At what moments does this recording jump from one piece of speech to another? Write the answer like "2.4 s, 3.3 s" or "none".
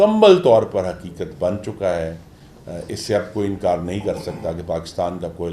none